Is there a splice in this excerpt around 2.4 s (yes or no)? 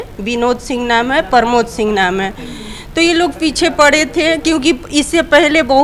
no